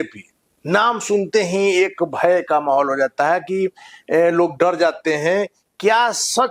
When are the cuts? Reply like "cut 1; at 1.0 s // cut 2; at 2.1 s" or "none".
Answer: none